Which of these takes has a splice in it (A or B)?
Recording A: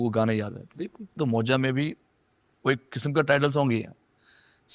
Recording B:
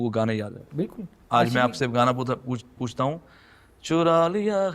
A